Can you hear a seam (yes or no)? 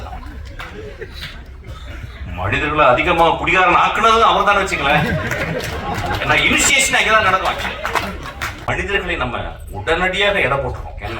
yes